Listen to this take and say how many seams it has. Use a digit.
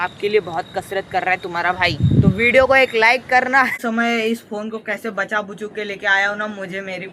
1